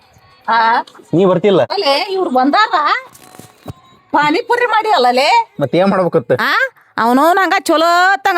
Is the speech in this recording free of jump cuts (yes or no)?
no